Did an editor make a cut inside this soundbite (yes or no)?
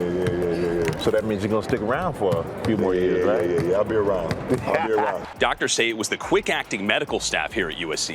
no